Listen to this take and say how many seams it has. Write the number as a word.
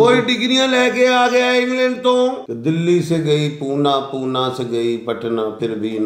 one